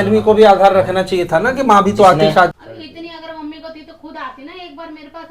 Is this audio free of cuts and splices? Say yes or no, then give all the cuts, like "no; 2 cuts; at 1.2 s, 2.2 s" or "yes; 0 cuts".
no; 1 cut; at 2.5 s